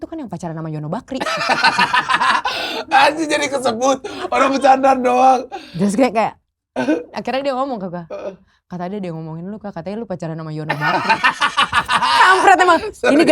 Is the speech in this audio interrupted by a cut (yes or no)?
no